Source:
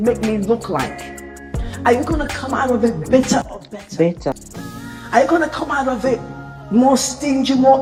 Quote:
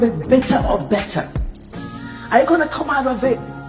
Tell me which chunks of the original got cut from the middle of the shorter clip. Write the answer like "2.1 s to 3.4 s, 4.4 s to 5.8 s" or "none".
none

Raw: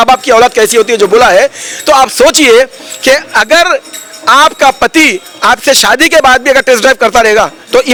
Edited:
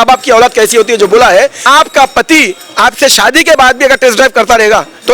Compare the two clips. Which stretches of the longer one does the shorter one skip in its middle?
1.6 s to 4.2 s

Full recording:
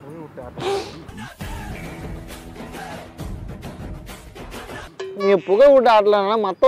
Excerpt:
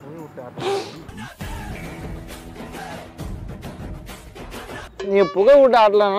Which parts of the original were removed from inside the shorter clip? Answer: 5.1 s to 5.2 s

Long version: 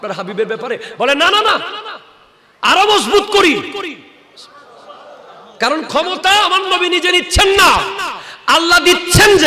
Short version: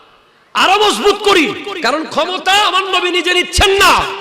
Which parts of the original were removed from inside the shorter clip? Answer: 3.8 s to 5.5 s

